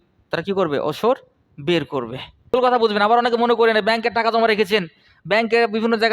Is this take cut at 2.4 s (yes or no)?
yes